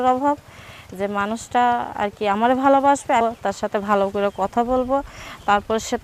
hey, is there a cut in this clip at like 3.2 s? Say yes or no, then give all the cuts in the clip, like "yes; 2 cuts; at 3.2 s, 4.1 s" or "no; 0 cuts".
yes; 1 cut; at 3.2 s